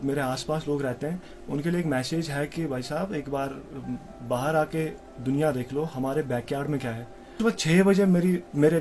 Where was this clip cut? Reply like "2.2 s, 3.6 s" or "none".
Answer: 7.4 s